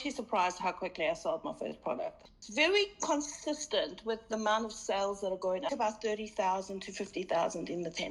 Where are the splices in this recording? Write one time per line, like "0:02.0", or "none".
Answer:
0:02.2
0:05.7